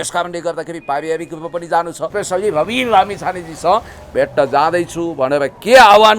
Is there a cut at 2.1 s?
yes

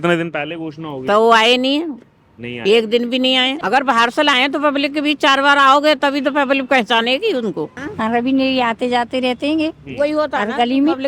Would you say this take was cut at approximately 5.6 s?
no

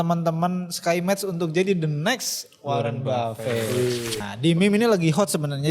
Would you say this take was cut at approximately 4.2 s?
yes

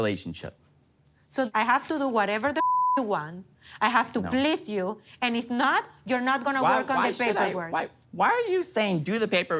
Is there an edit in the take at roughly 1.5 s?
yes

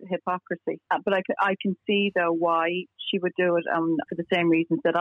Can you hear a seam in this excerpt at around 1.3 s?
no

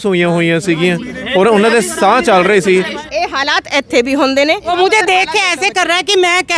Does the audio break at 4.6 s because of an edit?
yes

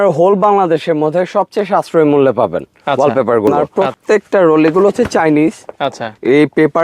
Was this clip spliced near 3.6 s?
yes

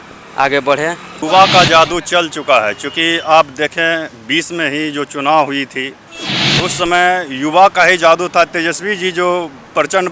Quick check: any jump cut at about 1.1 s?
yes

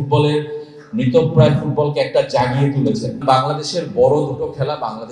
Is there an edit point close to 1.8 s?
no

